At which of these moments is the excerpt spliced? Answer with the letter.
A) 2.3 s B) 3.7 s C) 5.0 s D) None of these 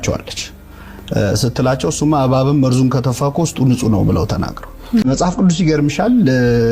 C